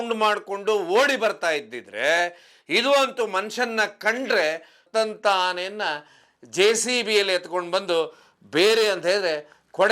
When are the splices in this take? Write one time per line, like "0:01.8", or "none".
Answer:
0:04.7